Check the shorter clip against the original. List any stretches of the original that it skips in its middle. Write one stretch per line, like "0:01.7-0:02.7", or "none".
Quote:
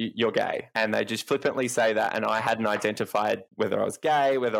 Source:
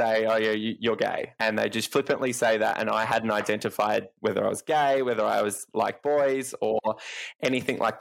none